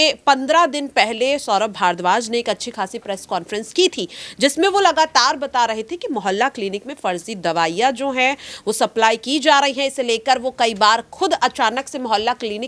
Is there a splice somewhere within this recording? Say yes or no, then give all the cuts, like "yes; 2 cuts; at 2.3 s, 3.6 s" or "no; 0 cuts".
no; 0 cuts